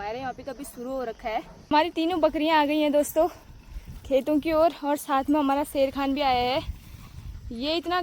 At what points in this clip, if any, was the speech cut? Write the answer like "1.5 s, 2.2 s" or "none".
1.7 s